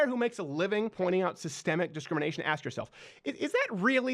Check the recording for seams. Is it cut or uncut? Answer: cut